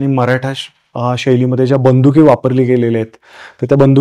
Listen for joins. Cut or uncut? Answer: uncut